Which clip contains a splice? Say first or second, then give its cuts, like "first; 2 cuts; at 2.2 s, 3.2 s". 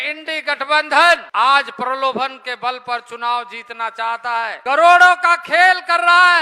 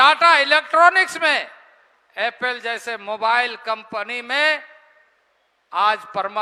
first; 2 cuts; at 1.3 s, 4.6 s